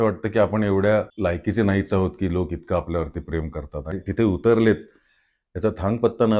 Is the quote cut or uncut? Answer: cut